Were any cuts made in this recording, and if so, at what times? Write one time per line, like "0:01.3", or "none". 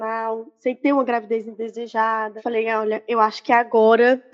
0:02.3